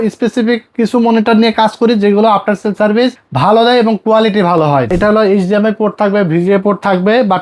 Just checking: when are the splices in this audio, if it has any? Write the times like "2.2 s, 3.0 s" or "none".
4.9 s